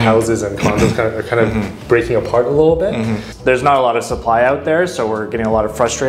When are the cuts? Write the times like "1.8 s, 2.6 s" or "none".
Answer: 3.2 s